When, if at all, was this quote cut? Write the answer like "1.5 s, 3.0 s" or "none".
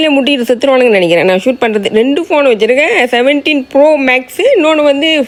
none